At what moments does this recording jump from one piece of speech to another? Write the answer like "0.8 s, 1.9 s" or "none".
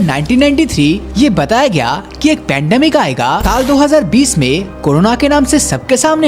1.1 s, 3.5 s

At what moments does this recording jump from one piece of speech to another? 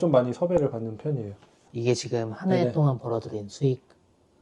1.5 s

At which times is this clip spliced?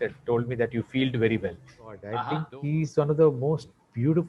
2.1 s

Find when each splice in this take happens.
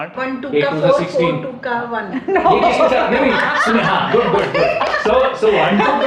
none

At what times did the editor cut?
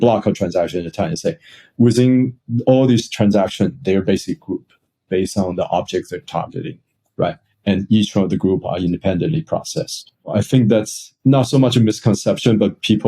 10.3 s

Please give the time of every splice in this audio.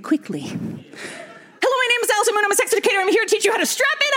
1.5 s

